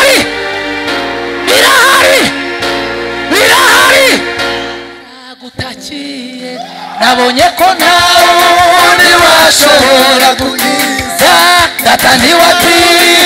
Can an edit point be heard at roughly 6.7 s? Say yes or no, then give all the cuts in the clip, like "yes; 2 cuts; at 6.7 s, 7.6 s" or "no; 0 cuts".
no; 1 cut; at 5.0 s